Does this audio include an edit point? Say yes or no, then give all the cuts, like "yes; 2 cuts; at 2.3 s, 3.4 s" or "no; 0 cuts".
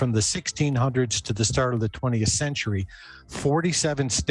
no; 0 cuts